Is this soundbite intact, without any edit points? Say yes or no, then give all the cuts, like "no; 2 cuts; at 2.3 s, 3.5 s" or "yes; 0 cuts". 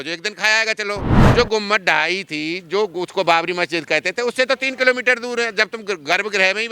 no; 1 cut; at 1.2 s